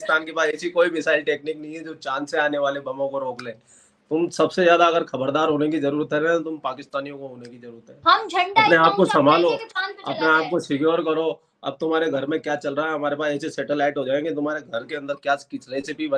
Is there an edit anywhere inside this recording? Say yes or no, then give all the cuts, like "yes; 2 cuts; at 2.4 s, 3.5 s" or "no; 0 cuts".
no; 0 cuts